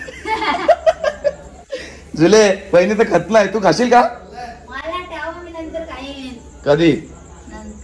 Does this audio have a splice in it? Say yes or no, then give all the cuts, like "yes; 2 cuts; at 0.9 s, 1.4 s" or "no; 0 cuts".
no; 0 cuts